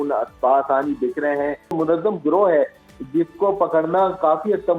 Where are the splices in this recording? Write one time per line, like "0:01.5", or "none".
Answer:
0:01.7